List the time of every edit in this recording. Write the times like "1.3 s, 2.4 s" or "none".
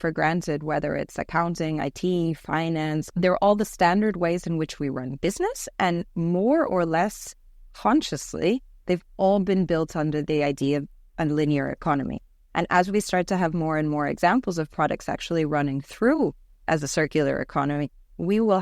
3.1 s